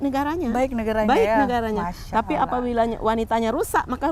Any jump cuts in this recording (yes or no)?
no